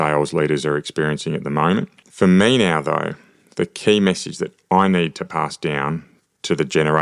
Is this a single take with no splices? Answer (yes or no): no